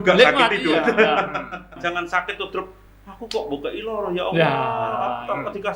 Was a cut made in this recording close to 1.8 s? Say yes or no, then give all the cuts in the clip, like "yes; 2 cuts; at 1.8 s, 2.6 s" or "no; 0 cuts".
yes; 1 cut; at 1.8 s